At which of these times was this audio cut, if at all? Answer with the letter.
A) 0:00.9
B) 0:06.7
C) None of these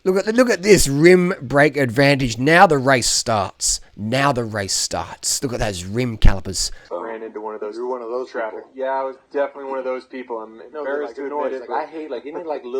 B